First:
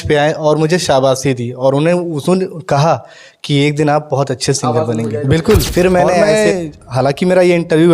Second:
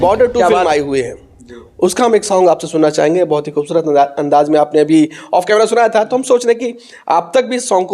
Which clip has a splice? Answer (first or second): first